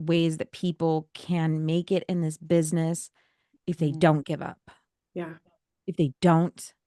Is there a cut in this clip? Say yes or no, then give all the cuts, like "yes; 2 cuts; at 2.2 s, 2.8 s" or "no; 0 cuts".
no; 0 cuts